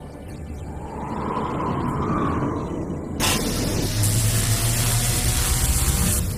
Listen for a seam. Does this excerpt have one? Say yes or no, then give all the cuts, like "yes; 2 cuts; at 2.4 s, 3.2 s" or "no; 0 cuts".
no; 0 cuts